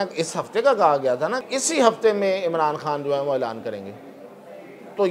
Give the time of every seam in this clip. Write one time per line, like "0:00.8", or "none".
0:01.4